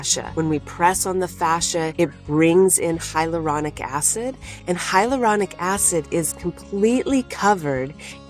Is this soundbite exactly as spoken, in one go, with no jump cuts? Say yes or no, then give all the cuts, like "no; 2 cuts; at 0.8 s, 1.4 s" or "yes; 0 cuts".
yes; 0 cuts